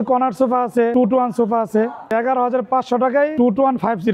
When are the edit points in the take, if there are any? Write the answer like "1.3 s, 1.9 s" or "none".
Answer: 0.9 s, 2.1 s, 3.3 s